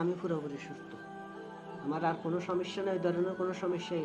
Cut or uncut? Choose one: uncut